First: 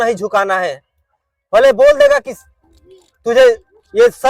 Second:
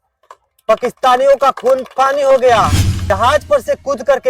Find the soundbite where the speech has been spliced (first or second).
second